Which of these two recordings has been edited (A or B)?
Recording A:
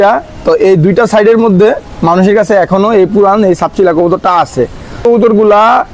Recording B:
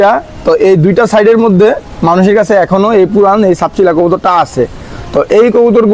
A